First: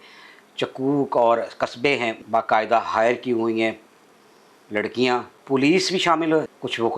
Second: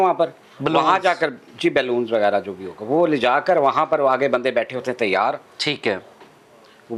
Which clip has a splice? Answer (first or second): first